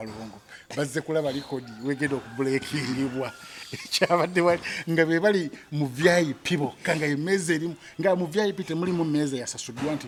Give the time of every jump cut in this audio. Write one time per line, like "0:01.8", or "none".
none